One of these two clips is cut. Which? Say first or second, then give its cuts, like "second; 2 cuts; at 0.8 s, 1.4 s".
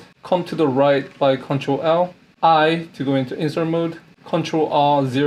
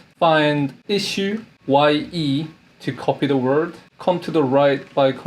second; 1 cut; at 1.5 s